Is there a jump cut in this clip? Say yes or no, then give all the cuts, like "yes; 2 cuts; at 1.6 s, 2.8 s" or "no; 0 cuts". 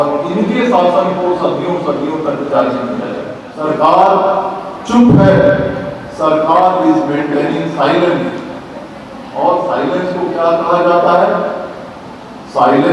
yes; 1 cut; at 3.4 s